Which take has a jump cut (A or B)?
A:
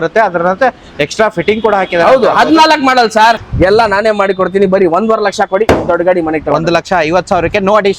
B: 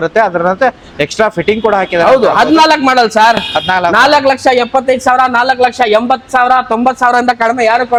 A